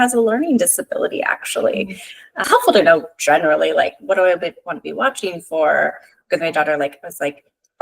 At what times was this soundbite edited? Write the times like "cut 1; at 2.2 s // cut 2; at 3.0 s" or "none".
cut 1; at 2.4 s